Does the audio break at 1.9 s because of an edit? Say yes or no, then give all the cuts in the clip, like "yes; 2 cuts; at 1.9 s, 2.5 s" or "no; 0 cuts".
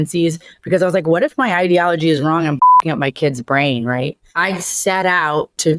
no; 1 cut; at 4.0 s